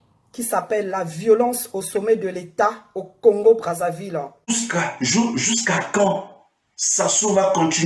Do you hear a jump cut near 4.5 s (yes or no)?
yes